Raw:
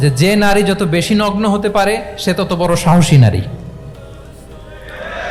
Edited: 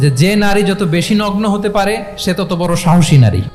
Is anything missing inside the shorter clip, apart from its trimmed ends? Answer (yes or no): no